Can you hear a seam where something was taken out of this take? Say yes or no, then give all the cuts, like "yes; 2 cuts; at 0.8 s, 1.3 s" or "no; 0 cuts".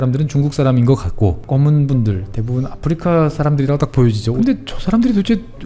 yes; 2 cuts; at 1.4 s, 4.3 s